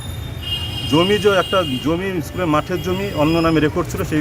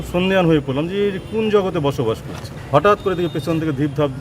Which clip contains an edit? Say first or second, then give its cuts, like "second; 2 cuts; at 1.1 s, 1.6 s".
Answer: second; 1 cut; at 2.6 s